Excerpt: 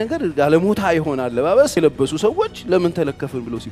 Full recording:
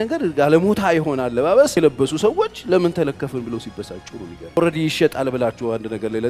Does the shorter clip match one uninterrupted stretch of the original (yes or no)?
yes